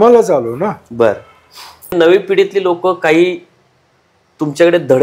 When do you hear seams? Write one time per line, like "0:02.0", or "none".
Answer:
0:01.9